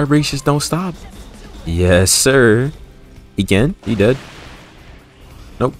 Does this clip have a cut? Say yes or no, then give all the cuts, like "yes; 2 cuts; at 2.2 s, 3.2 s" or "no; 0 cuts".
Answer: yes; 2 cuts; at 1.0 s, 3.8 s